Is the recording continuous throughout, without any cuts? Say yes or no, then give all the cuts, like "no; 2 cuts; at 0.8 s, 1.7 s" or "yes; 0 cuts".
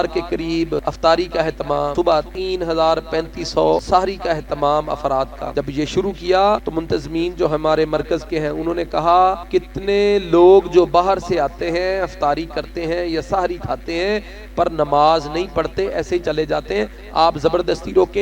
no; 6 cuts; at 0.8 s, 2.0 s, 3.8 s, 5.4 s, 6.7 s, 9.4 s